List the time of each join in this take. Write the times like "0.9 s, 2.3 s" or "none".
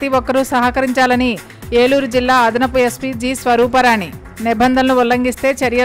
none